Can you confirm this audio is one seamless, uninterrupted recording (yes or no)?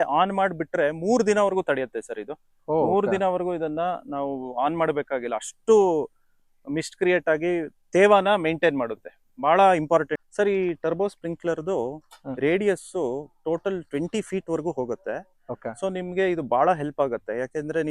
no